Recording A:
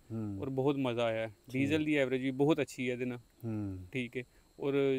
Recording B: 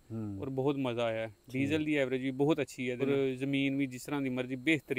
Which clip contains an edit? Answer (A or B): B